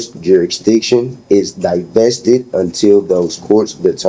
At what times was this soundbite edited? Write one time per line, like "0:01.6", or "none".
none